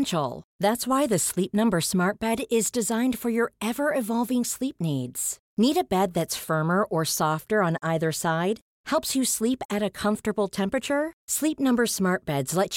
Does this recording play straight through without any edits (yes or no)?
yes